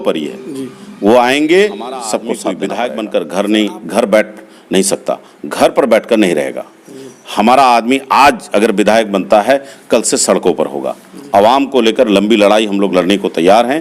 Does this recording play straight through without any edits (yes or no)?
no